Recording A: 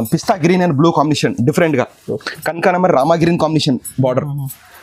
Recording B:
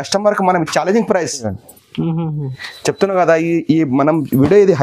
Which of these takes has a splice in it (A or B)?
B